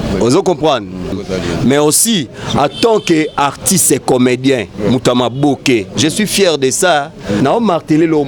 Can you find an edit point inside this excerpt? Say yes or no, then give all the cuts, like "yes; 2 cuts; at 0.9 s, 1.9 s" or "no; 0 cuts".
yes; 2 cuts; at 1.1 s, 7.4 s